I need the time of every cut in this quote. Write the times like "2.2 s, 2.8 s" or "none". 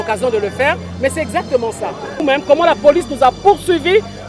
2.2 s